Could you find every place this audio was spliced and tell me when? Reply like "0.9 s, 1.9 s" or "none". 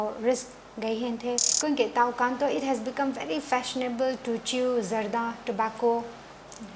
1.5 s

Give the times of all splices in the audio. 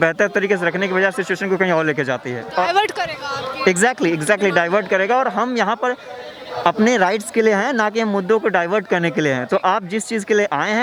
none

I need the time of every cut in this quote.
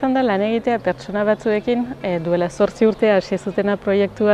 none

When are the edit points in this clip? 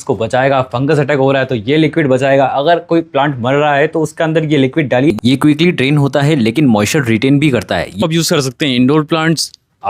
5.1 s, 8.0 s

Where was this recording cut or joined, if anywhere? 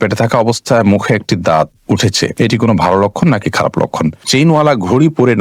2.3 s, 4.3 s

